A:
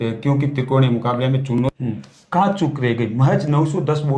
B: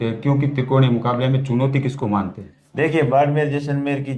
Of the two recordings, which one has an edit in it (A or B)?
A